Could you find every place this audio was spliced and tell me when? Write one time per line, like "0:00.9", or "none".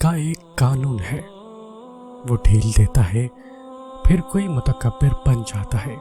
none